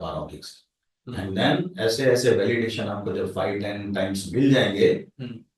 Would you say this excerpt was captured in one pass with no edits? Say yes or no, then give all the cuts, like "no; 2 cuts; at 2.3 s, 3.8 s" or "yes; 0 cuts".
yes; 0 cuts